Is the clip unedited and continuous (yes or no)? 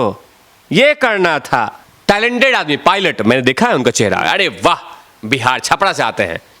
no